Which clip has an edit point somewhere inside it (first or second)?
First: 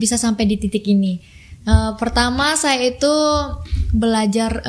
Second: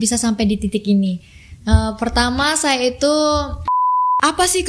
second